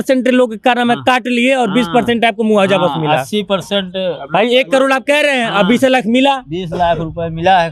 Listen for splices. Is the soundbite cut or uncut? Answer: uncut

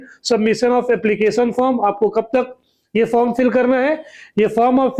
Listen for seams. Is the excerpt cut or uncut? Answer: uncut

